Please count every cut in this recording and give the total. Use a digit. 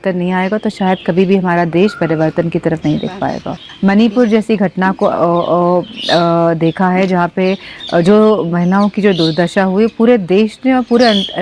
1